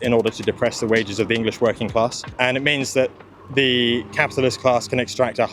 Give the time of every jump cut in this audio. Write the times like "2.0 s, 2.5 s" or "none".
2.3 s